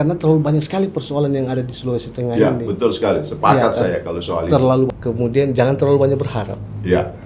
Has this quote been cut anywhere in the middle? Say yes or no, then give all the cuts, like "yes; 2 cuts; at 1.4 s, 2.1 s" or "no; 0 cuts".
yes; 1 cut; at 4.9 s